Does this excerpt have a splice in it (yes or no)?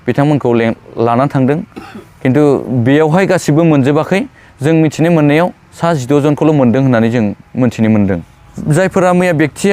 no